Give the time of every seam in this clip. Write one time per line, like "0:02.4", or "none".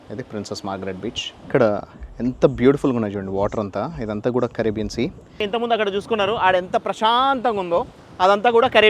0:01.3
0:05.4